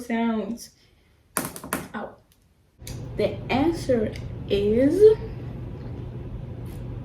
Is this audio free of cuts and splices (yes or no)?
no